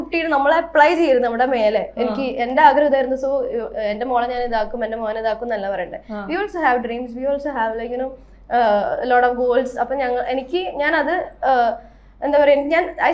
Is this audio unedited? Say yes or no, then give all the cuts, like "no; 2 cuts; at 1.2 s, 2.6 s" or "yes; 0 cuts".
yes; 0 cuts